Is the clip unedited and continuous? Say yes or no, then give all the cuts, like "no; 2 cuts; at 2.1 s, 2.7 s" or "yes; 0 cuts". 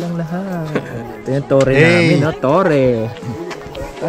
no; 2 cuts; at 1.0 s, 3.2 s